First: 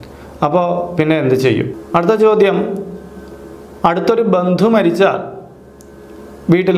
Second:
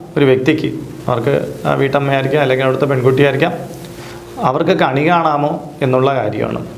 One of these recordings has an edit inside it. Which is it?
first; 1 cut; at 1.8 s

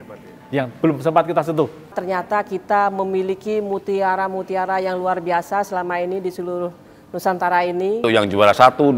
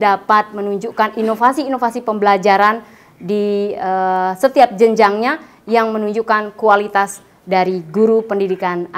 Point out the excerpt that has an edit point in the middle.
first; 2 cuts; at 2.0 s, 8.0 s

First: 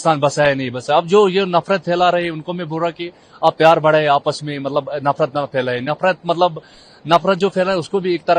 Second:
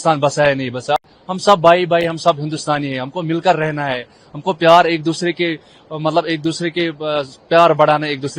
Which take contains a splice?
second; 1 cut; at 1.0 s

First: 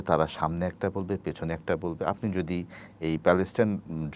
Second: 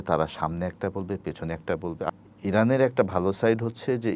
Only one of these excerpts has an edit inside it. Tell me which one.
second; 1 cut; at 2.2 s

